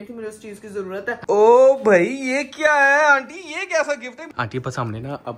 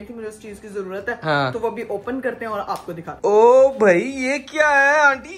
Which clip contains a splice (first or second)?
first